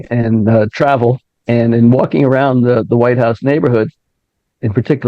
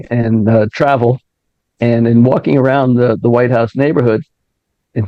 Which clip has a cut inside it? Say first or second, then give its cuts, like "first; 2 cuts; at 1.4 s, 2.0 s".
first; 1 cut; at 1.3 s